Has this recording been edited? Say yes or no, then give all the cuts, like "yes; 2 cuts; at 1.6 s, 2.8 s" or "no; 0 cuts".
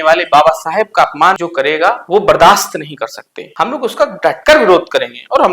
yes; 1 cut; at 1.4 s